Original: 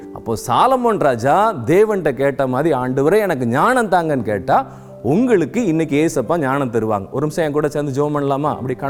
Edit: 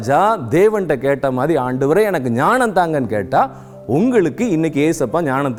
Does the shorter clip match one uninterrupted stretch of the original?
yes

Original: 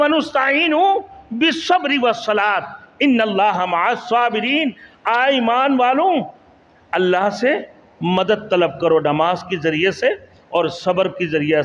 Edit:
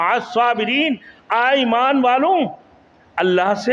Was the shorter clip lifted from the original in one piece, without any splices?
yes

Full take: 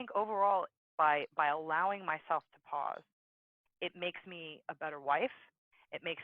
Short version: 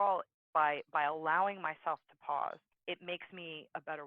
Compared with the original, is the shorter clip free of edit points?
no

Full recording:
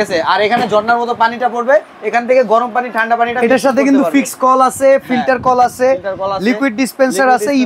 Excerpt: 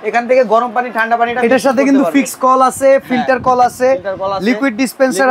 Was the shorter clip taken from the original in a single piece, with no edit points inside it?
yes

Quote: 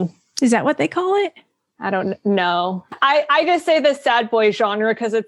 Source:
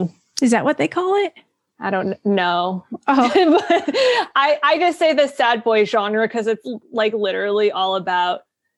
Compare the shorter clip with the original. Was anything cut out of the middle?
yes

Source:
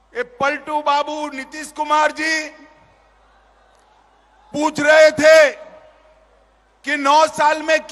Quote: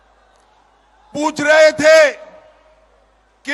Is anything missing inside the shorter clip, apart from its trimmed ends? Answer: no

